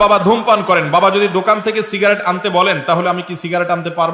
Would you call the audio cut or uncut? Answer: uncut